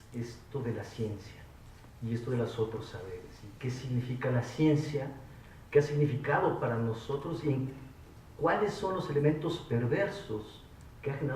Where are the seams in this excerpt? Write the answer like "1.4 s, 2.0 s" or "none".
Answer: 1.3 s

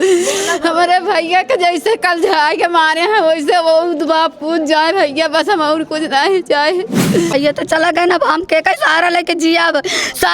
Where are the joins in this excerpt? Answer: 7.3 s

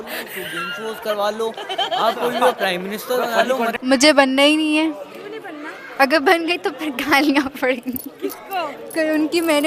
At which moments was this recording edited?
3.8 s

